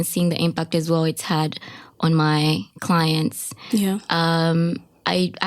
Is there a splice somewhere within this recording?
no; 0 cuts

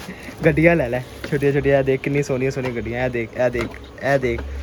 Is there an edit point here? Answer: no; 0 cuts

